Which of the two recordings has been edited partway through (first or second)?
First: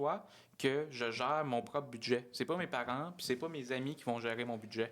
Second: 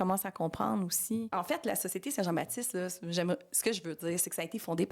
second